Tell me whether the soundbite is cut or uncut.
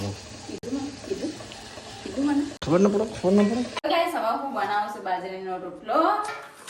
cut